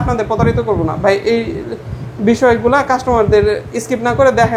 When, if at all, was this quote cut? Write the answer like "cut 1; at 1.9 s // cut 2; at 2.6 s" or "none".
none